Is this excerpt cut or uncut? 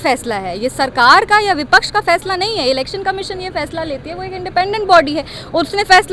uncut